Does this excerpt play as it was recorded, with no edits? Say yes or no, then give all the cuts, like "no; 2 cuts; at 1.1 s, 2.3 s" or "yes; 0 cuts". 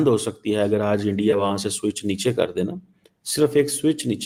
yes; 0 cuts